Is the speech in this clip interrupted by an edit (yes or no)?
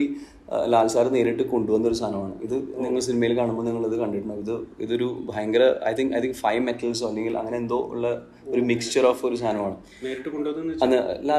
no